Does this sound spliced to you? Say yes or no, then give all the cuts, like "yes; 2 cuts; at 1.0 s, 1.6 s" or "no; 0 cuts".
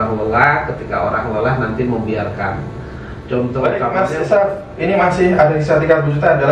yes; 1 cut; at 3.9 s